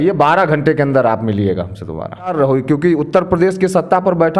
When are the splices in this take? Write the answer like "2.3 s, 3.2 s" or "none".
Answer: 2.3 s